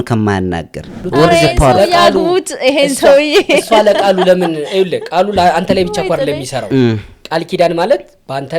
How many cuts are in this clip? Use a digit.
1